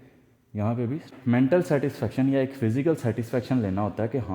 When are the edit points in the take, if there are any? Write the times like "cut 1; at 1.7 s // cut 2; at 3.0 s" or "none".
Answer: cut 1; at 1.1 s